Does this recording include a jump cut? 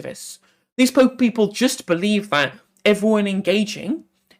no; 0 cuts

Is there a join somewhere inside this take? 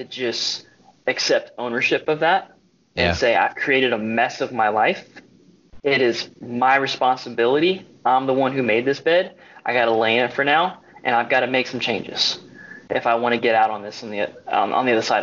no; 0 cuts

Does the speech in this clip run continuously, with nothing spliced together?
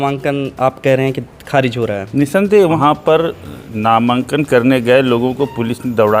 no; 1 cut; at 2.8 s

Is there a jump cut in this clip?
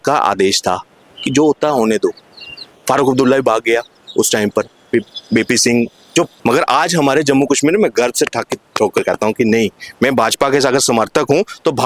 yes; 1 cut; at 6.3 s

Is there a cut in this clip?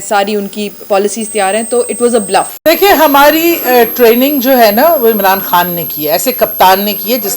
yes; 1 cut; at 2.5 s

